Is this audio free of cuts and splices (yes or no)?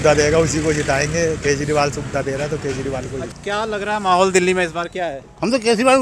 no